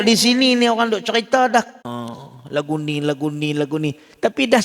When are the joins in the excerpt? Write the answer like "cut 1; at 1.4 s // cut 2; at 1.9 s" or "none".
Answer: cut 1; at 1.7 s